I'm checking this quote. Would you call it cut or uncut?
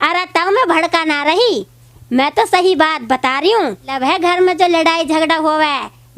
cut